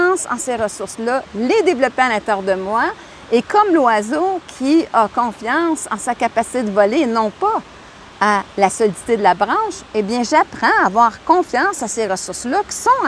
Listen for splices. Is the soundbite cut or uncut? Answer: uncut